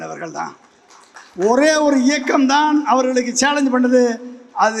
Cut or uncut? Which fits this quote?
uncut